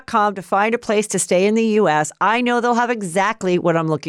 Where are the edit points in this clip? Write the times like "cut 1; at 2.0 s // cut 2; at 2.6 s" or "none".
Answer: none